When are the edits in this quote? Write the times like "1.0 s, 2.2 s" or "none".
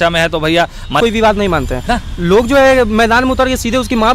1.0 s